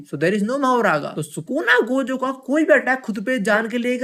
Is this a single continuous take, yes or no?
yes